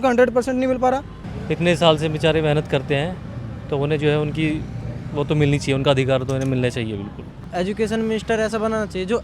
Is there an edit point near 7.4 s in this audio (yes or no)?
yes